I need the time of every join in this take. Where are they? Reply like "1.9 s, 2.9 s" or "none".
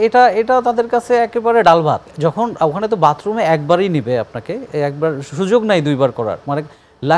2.1 s